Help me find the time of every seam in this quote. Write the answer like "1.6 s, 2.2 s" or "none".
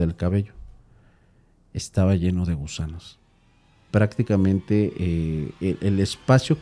3.9 s